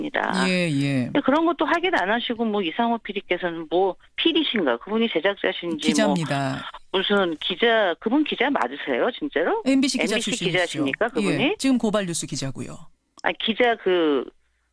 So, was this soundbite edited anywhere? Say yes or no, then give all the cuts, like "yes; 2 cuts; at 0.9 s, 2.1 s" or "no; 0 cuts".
no; 0 cuts